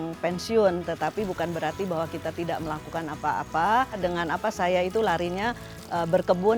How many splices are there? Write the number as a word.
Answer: one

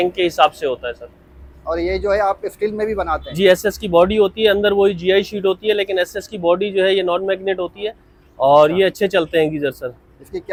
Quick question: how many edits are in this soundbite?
zero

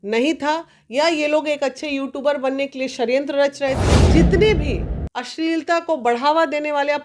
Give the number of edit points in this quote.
one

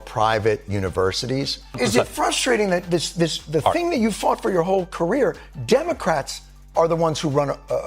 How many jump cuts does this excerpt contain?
one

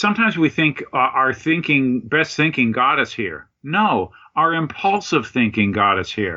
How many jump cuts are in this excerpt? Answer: zero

